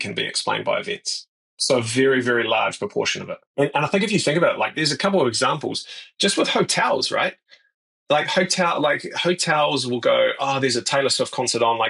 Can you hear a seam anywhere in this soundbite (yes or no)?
no